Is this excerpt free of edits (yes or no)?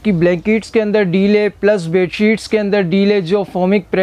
yes